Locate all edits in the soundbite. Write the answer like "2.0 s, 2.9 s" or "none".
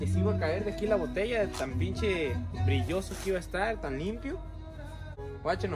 none